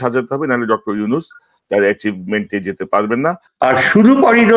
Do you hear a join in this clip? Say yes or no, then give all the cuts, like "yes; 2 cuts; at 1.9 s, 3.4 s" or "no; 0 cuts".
yes; 1 cut; at 3.4 s